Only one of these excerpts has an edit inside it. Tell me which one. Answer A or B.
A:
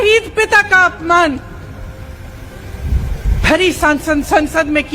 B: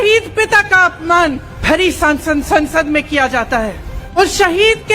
B